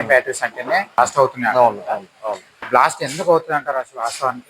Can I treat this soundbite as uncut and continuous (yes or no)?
no